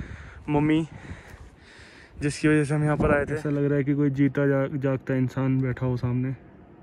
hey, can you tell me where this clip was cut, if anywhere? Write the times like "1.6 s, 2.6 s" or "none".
3.4 s